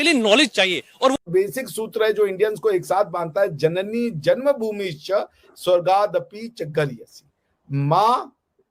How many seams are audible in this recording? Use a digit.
1